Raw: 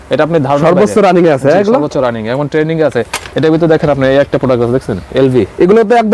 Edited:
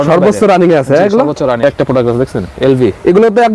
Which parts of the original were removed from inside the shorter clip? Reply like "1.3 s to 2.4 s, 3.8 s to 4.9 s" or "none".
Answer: 2.2 s to 4.2 s